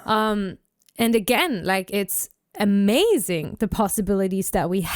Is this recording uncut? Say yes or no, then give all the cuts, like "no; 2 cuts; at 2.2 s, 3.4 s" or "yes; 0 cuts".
no; 1 cut; at 1.9 s